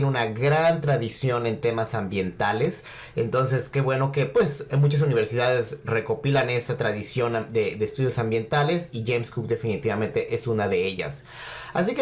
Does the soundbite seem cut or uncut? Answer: uncut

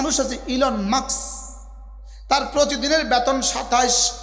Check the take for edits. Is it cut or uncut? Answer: uncut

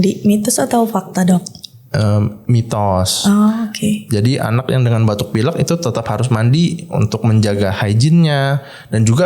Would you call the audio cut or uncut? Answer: uncut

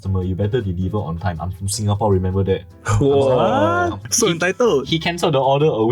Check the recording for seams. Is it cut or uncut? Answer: cut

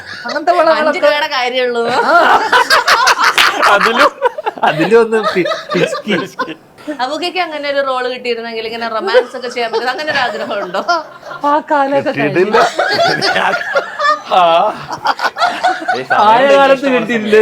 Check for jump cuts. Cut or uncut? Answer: uncut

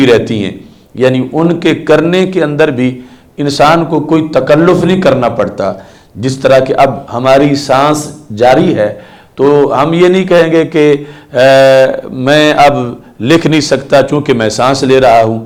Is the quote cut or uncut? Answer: uncut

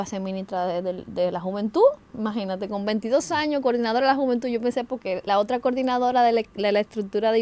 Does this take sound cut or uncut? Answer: uncut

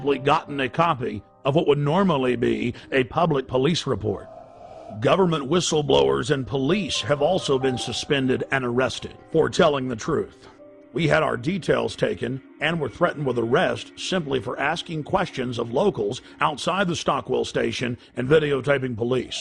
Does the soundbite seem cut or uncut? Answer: cut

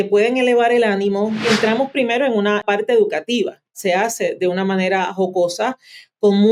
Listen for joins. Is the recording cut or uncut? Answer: cut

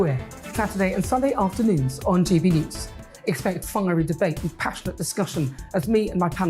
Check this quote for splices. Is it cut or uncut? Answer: uncut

